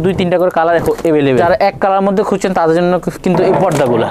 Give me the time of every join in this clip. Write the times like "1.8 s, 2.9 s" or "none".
1.4 s